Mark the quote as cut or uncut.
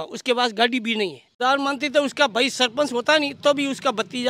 cut